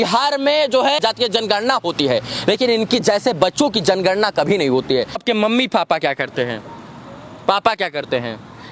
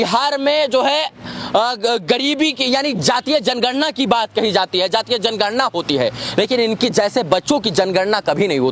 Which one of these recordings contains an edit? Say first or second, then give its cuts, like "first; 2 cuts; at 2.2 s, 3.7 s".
first; 2 cuts; at 1.0 s, 5.2 s